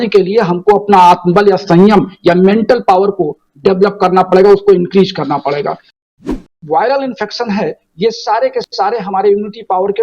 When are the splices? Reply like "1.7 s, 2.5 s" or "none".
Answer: 6.0 s